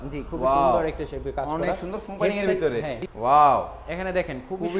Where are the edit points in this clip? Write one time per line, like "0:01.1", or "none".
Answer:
0:03.0

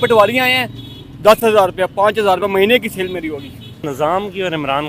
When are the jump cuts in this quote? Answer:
0:03.9

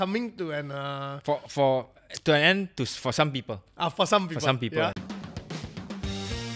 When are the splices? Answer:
0:05.0

